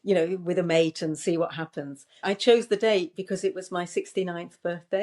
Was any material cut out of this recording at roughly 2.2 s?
yes; 1 cut; at 2.2 s

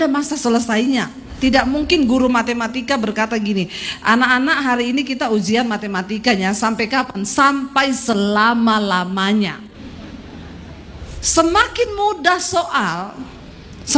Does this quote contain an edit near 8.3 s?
no; 2 cuts; at 1.3 s, 11.0 s

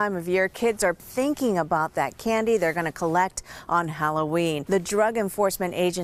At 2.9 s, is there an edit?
no; 2 cuts; at 1.0 s, 4.6 s

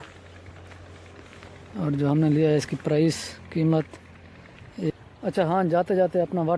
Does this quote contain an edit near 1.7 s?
no; 1 cut; at 4.9 s

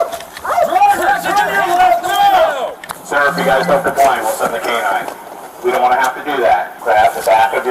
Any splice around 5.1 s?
no; 2 cuts; at 2.8 s, 6.7 s

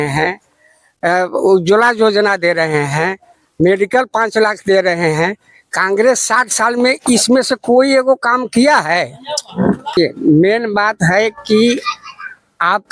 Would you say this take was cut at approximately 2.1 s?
no; 1 cut; at 9.9 s

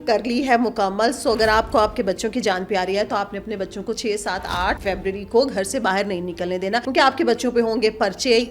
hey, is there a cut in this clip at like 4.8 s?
yes; 2 cuts; at 4.8 s, 6.9 s

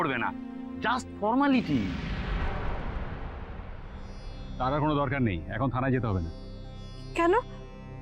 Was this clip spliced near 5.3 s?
no; 2 cuts; at 2.0 s, 3.6 s

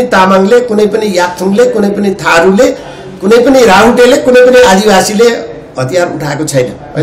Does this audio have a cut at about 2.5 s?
no; 0 cuts

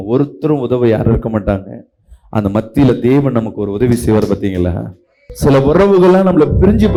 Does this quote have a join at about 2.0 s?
no; 0 cuts

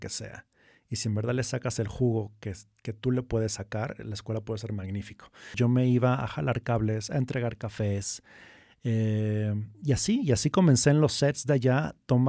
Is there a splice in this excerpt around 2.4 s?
no; 1 cut; at 5.5 s

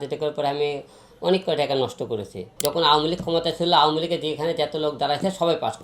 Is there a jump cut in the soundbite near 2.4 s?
yes; 1 cut; at 2.4 s

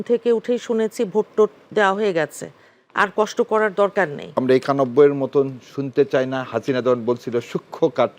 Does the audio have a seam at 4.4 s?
yes; 1 cut; at 4.4 s

